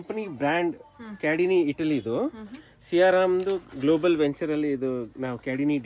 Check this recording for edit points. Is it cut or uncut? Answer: uncut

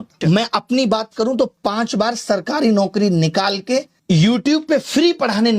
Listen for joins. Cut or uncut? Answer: cut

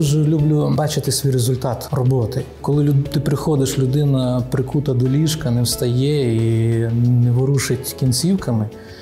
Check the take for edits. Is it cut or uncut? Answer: cut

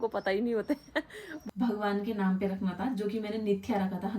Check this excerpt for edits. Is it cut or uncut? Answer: cut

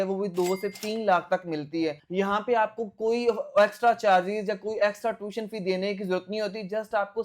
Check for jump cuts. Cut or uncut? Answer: uncut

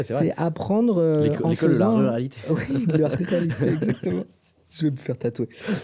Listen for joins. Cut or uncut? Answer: uncut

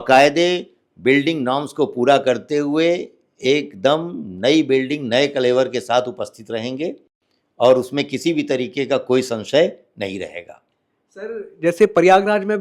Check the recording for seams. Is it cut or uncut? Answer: uncut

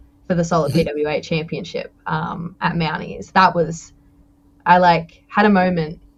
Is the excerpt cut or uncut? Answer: uncut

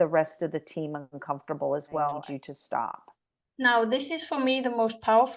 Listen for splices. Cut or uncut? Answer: cut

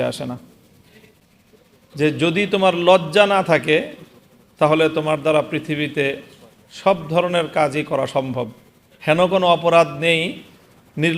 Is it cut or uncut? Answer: cut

